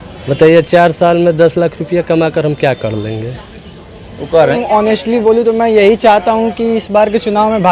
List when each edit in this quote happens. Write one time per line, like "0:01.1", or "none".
0:04.6